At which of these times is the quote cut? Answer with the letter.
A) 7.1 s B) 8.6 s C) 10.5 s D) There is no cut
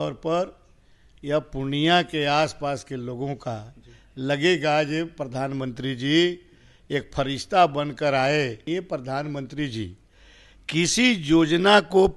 B